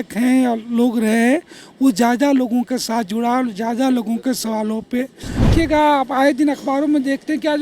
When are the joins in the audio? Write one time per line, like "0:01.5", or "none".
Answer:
0:05.4

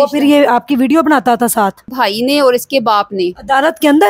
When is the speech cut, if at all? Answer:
0:01.9

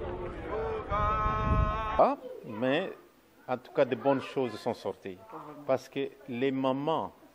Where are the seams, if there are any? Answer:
0:02.0

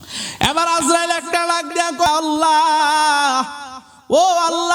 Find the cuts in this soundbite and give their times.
0:02.1

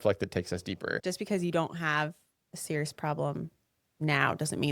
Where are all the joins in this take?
0:01.0

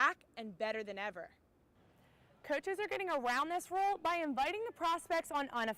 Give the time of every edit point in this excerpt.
0:01.6

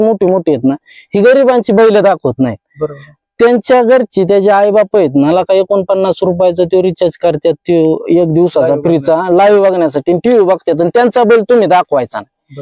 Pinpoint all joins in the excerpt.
none

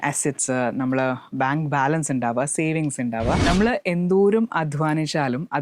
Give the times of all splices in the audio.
0:03.4

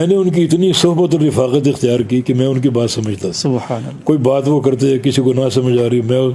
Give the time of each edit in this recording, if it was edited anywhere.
none

